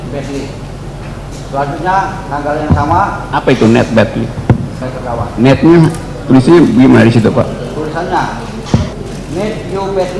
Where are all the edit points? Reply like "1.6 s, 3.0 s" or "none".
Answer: 4.9 s, 9.0 s